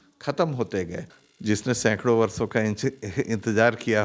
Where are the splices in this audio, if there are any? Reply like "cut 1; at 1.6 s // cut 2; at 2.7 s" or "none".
cut 1; at 1.1 s